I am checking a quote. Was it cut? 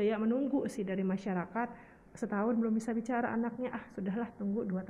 no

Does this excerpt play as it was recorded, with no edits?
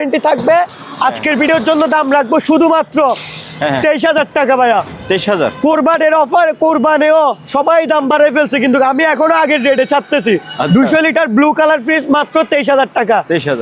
yes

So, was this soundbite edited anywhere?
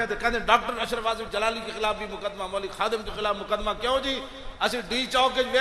no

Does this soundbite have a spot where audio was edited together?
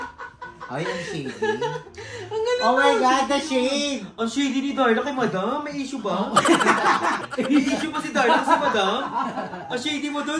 yes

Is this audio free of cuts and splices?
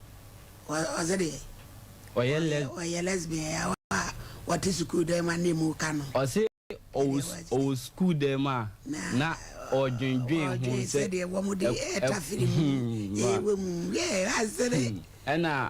yes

